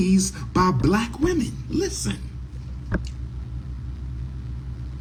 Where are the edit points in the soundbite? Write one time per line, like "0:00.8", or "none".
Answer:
none